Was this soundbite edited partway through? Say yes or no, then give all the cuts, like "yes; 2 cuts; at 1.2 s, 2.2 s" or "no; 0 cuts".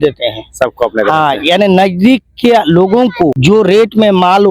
yes; 1 cut; at 3.4 s